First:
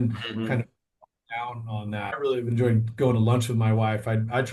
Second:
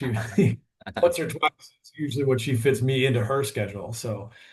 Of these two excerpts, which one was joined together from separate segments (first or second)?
first